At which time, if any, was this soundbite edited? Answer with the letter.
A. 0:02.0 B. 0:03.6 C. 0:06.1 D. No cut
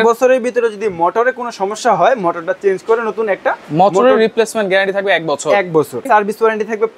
C